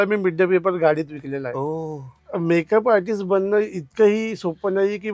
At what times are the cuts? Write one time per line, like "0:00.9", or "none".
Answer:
0:02.2